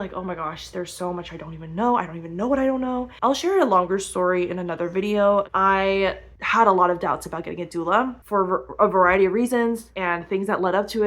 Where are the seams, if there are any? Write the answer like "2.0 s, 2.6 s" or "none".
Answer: none